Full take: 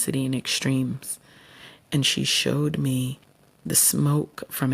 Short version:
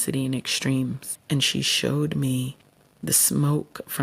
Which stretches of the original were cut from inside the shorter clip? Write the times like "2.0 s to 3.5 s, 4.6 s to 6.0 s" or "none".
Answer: 1.1 s to 1.7 s